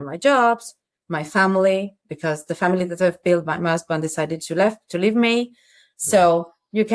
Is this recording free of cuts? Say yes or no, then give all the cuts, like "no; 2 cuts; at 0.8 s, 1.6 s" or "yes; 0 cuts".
yes; 0 cuts